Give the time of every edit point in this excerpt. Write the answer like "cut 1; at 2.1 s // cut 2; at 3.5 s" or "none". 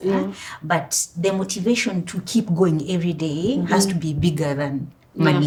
none